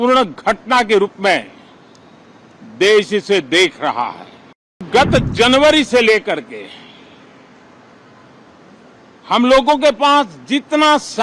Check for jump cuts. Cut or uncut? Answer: cut